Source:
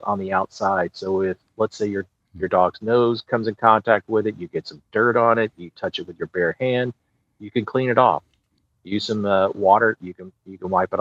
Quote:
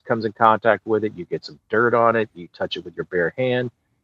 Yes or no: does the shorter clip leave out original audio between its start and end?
no